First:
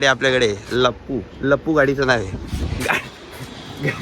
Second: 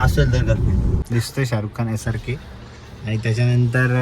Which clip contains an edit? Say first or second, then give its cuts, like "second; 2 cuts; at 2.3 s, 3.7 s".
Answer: second; 1 cut; at 1.0 s